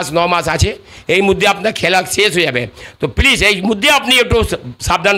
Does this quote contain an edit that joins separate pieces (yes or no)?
no